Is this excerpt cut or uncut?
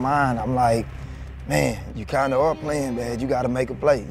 cut